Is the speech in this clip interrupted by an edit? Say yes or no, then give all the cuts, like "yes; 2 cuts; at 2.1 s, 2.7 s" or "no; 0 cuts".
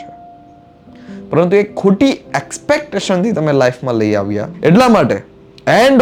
yes; 1 cut; at 4.5 s